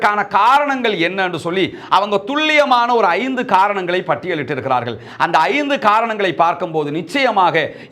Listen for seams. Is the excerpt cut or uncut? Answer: uncut